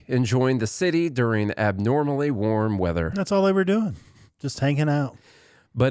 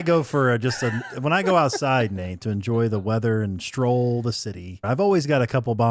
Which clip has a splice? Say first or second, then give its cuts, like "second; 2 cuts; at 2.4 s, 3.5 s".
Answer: second; 1 cut; at 4.8 s